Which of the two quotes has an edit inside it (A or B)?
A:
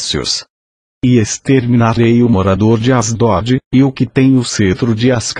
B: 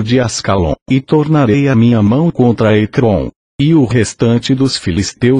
A